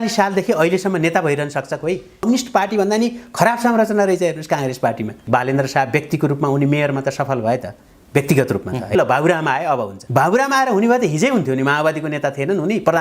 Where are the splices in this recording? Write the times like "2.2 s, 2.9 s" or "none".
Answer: 5.2 s, 8.9 s